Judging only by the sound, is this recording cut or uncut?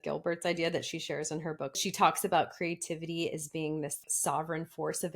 cut